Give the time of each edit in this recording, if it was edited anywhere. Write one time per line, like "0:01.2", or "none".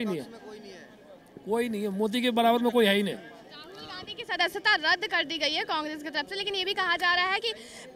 none